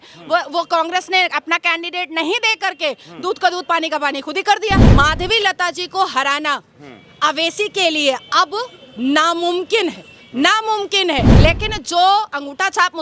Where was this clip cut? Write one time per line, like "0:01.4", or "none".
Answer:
0:04.9
0:11.3